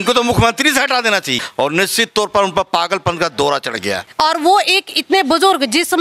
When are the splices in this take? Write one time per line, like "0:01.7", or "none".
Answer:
0:01.4
0:04.1